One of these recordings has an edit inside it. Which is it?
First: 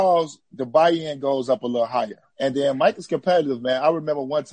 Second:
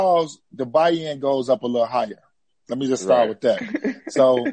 first; 1 cut; at 2.2 s

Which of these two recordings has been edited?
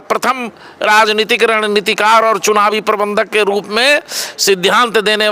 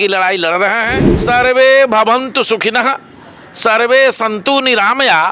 second; 1 cut; at 1.0 s

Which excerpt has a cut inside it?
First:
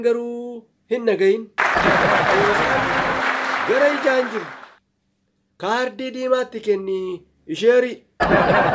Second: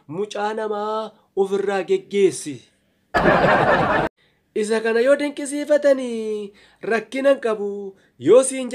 second; 1 cut; at 4.1 s

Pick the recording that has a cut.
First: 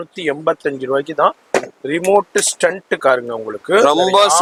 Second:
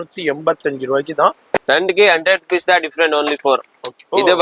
second; 1 cut; at 1.5 s

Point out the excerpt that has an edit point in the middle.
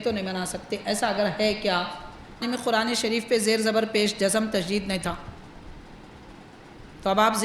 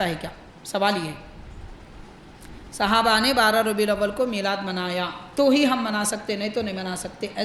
first; 1 cut; at 2.4 s

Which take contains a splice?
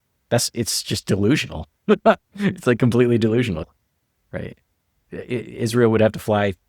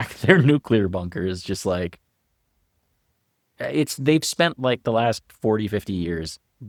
first; 1 cut; at 3.7 s

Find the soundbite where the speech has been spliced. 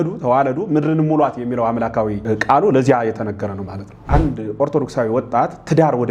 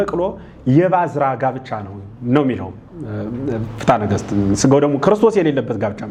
first; 2 cuts; at 2.2 s, 4.0 s

